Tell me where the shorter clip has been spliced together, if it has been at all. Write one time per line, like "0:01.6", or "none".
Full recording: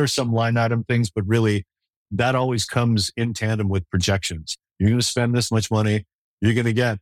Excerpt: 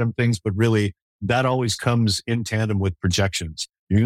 0:01.1